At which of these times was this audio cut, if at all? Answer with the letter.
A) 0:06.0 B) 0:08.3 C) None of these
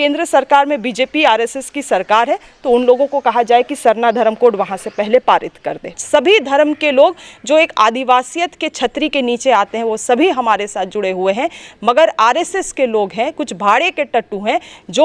A